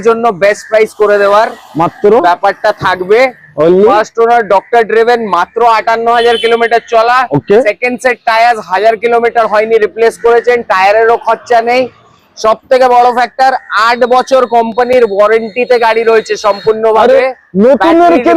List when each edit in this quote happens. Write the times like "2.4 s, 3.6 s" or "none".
none